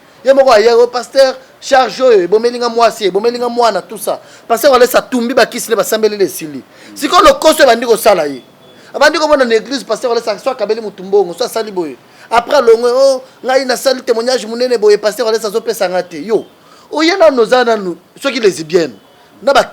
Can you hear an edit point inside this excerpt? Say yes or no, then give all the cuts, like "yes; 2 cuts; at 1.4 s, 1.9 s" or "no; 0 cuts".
no; 0 cuts